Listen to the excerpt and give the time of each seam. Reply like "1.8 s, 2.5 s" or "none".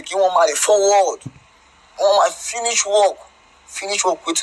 2.1 s